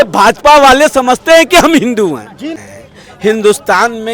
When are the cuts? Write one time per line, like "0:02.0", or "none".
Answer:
0:02.5